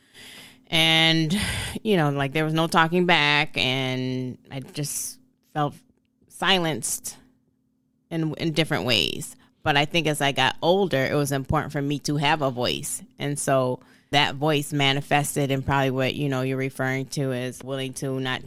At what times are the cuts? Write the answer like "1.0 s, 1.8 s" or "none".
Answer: none